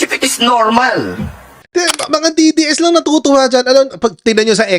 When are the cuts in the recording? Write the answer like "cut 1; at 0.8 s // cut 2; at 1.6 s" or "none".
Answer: cut 1; at 1.6 s

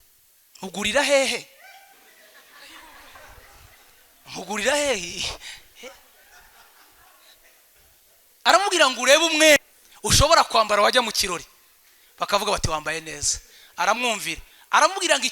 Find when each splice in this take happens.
none

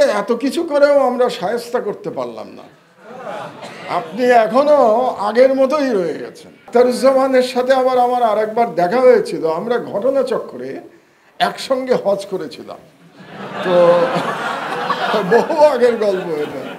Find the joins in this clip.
cut 1; at 6.6 s

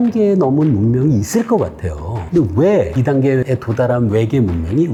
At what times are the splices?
none

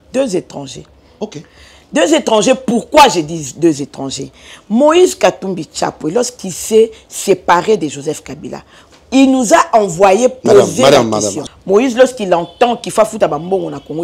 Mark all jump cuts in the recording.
cut 1; at 11.5 s

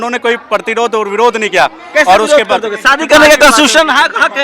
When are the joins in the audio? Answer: none

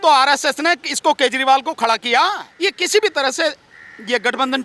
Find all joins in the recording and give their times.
cut 1; at 2.5 s

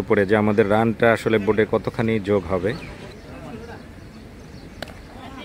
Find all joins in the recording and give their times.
none

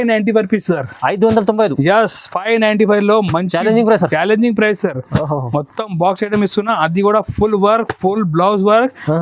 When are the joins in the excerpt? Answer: none

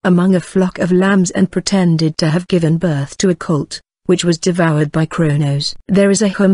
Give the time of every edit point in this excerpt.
cut 1; at 3.8 s

